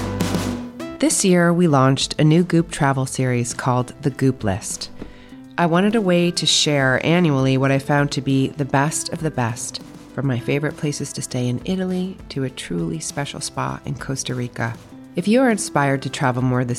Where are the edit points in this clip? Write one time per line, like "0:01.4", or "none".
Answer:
0:00.9